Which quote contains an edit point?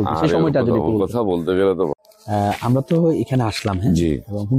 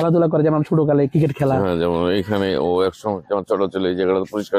first; 1 cut; at 1.9 s

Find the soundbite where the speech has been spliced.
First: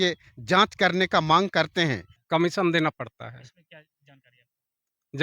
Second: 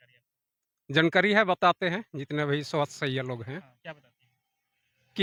first; 1 cut; at 2.1 s

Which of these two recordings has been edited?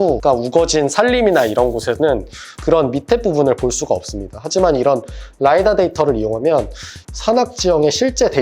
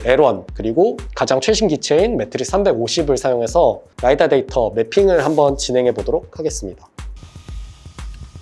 first; 2 cuts; at 2.5 s, 7.0 s

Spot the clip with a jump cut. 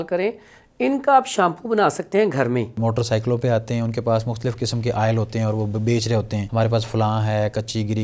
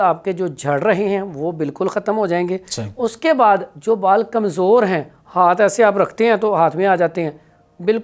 first; 2 cuts; at 2.8 s, 6.4 s

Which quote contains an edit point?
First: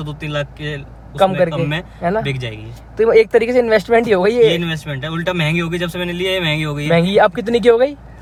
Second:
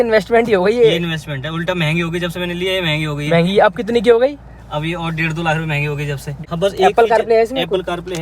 second; 1 cut; at 6.4 s

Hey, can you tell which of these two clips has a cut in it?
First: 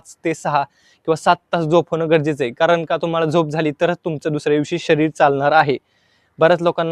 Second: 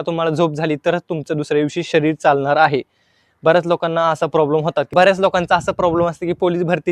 second; 1 cut; at 4.9 s

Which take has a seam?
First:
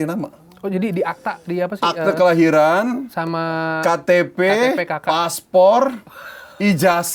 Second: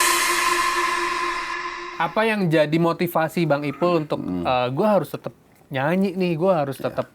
second; 1 cut; at 1.7 s

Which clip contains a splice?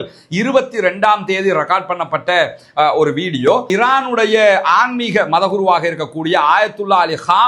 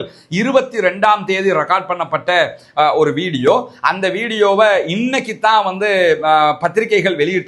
first; 1 cut; at 3.7 s

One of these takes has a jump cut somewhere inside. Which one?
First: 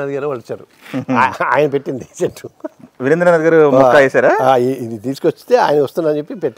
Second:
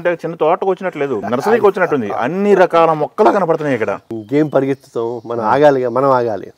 second; 2 cuts; at 1.2 s, 4.2 s

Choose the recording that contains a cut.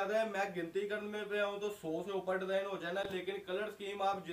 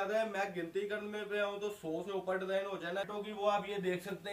second; 1 cut; at 3.1 s

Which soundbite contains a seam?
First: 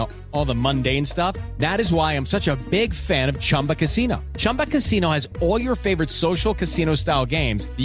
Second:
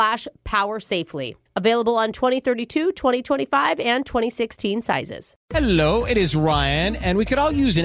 second; 1 cut; at 5.4 s

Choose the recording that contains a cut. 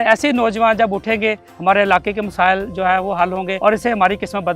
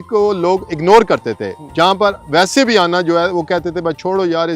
first; 1 cut; at 3.5 s

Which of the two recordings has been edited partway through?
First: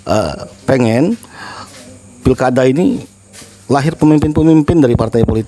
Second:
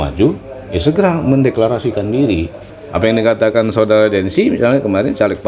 second; 1 cut; at 2.7 s

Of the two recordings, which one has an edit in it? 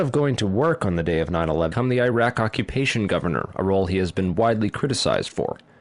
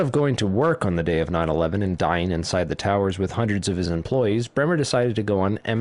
second; 1 cut; at 1.7 s

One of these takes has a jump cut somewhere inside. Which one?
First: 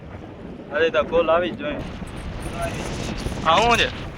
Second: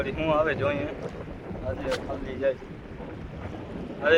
first; 1 cut; at 1.8 s

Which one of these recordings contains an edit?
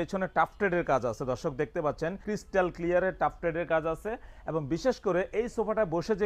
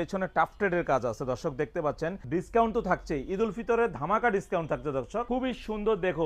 second; 2 cuts; at 2.2 s, 5.3 s

